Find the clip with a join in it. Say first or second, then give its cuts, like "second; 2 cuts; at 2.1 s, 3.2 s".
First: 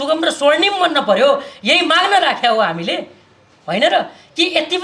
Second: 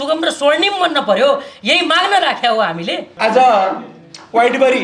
second; 1 cut; at 3.0 s